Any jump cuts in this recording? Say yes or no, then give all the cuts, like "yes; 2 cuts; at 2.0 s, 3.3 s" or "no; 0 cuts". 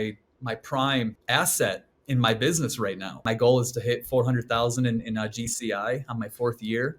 yes; 2 cuts; at 1.2 s, 3.2 s